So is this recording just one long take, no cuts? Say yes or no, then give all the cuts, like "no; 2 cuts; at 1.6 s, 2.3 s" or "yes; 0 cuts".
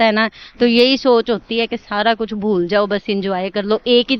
yes; 0 cuts